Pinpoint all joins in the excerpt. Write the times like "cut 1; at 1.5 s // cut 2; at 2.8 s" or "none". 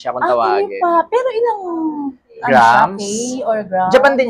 none